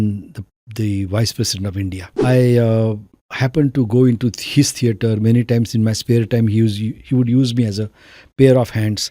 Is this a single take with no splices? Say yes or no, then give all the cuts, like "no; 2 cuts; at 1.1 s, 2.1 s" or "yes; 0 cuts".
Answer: no; 1 cut; at 2.1 s